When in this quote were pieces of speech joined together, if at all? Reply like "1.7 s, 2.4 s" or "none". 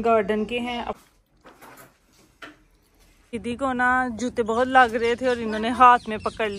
1.0 s, 3.4 s